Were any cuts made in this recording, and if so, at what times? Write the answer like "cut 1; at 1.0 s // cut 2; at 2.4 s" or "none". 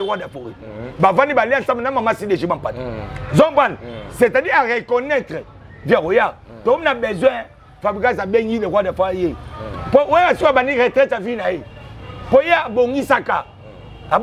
none